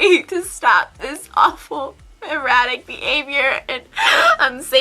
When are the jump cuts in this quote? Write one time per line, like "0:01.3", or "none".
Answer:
none